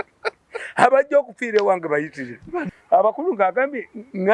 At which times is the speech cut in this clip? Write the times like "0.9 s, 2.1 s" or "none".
2.7 s